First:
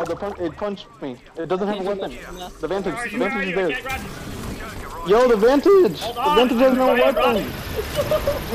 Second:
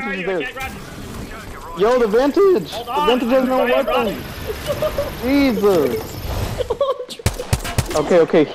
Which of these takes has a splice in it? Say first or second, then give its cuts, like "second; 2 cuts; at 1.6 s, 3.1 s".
second; 1 cut; at 6.2 s